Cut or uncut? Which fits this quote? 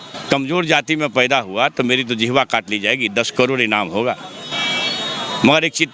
uncut